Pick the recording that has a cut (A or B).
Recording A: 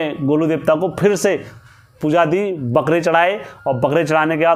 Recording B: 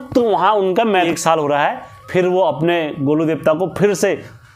B